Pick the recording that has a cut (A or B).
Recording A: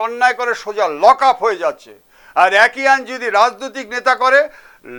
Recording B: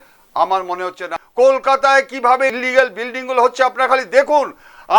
B